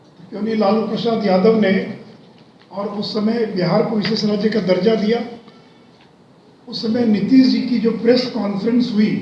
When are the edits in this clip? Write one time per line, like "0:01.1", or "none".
none